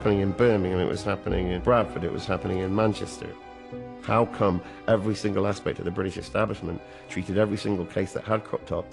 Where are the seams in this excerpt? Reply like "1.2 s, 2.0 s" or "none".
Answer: 1.6 s, 3.7 s